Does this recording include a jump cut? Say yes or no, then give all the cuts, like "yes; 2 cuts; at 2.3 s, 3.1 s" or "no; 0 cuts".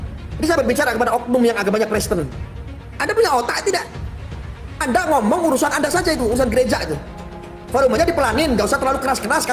no; 0 cuts